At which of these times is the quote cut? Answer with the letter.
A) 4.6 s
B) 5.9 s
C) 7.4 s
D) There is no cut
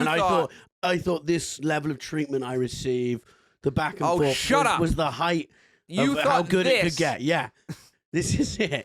D